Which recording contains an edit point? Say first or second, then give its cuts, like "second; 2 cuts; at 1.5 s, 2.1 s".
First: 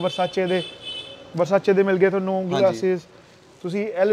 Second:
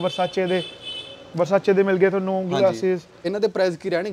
second; 1 cut; at 3.2 s